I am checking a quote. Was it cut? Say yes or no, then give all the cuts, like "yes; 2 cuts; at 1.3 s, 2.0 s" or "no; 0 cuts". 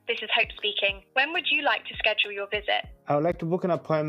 yes; 2 cuts; at 1.0 s, 2.9 s